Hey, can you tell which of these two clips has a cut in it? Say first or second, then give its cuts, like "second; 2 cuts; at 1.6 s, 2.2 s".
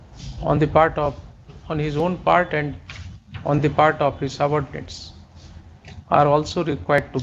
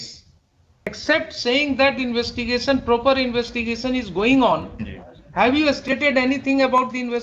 second; 1 cut; at 1.0 s